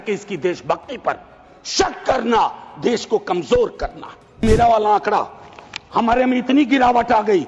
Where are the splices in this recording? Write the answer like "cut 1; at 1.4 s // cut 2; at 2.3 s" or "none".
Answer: cut 1; at 4.4 s